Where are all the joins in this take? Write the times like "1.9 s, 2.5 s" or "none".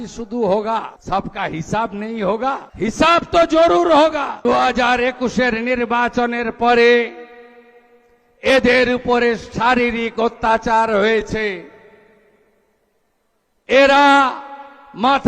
1.0 s, 2.7 s, 4.5 s